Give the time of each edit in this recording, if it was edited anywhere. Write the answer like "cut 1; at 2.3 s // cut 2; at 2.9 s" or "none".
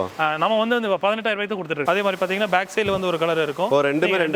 cut 1; at 1.8 s